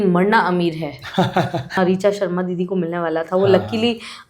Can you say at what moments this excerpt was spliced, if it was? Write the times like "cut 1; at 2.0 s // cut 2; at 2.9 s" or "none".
cut 1; at 1.8 s